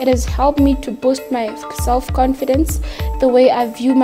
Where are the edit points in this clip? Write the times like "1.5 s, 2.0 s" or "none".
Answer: none